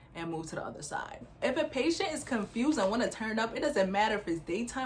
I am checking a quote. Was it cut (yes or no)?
yes